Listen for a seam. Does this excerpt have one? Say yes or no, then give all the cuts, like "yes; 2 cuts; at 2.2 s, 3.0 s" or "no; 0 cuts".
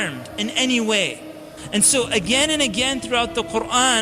yes; 1 cut; at 1.6 s